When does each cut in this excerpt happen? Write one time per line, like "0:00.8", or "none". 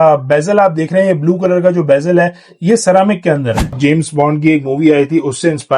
0:03.7